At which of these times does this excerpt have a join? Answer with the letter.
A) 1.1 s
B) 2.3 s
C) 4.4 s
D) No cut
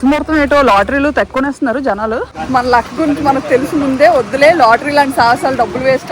B